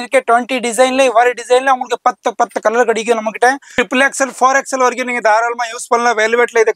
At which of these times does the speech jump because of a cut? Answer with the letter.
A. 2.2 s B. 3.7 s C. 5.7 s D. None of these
B